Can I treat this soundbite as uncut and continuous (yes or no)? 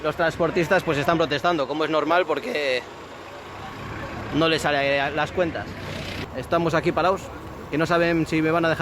no